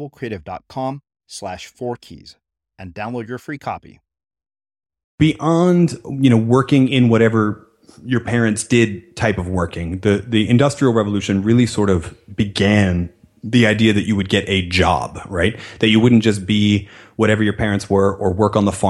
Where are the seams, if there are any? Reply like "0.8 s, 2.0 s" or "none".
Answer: 5.1 s